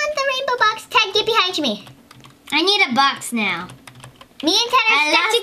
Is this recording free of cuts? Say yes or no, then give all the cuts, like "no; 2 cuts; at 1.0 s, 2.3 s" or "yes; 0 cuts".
yes; 0 cuts